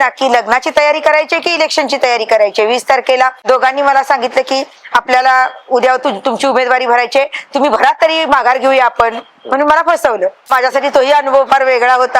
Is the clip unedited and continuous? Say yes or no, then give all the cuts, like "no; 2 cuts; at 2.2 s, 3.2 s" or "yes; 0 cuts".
no; 2 cuts; at 3.4 s, 10.5 s